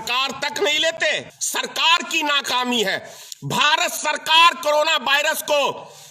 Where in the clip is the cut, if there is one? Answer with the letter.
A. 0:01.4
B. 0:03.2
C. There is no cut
A